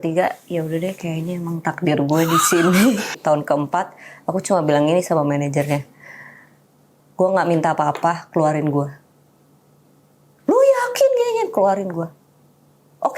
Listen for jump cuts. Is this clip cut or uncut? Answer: cut